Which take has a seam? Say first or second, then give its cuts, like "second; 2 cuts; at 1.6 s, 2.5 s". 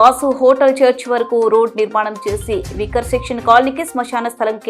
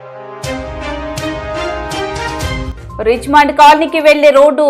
second; 1 cut; at 2.7 s